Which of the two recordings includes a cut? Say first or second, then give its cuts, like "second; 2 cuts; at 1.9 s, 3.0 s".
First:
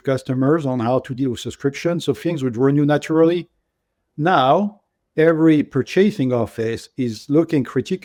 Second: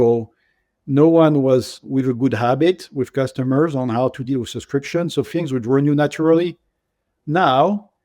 second; 1 cut; at 1.8 s